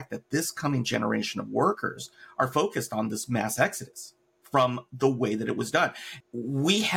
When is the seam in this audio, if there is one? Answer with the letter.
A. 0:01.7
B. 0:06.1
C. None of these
B